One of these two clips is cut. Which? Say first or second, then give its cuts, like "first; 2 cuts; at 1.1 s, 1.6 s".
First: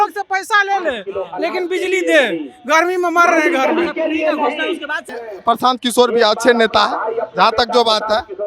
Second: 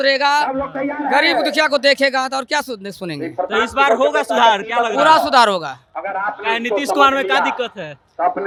first; 1 cut; at 5.2 s